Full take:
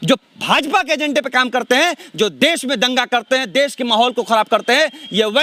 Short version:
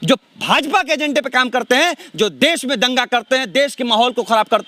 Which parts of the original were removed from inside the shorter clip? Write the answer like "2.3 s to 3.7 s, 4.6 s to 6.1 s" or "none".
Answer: none